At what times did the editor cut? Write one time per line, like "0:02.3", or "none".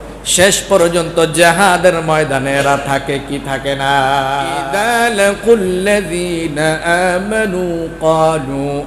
0:04.6